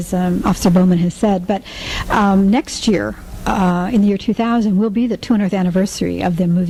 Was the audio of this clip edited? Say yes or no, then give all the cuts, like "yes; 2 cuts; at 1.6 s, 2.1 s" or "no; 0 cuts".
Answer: no; 0 cuts